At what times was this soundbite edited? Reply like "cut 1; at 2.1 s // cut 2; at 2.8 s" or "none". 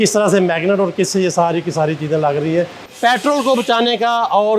cut 1; at 2.8 s